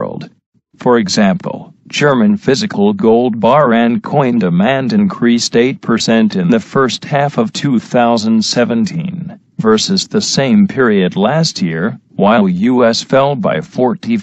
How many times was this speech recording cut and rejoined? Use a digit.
0